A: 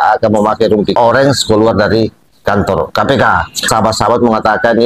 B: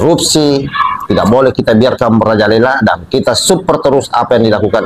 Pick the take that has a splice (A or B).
A